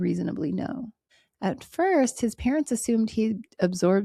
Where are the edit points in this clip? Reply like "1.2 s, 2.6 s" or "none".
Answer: none